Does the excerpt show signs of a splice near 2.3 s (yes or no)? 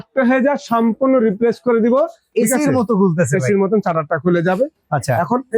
yes